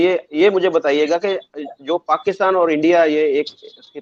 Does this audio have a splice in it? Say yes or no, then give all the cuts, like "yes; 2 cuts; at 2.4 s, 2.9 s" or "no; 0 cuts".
no; 0 cuts